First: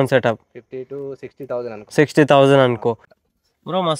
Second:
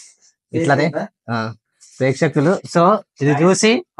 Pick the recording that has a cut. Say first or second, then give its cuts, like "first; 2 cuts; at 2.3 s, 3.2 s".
first; 1 cut; at 3.0 s